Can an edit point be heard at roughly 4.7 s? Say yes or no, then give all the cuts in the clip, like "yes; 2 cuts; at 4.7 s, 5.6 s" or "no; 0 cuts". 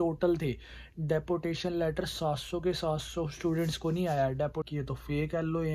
yes; 1 cut; at 4.7 s